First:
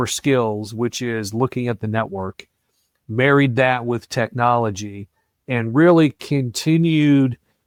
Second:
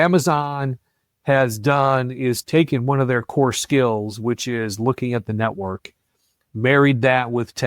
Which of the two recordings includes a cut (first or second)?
second